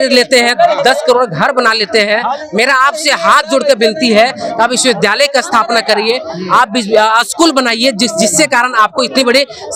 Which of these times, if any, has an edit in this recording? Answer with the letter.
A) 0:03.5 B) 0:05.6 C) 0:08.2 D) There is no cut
D